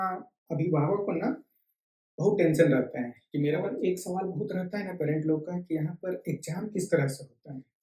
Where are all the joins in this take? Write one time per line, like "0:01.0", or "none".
0:03.5